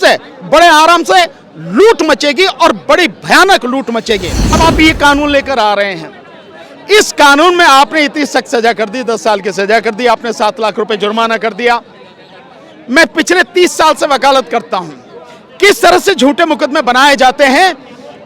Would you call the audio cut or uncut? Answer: cut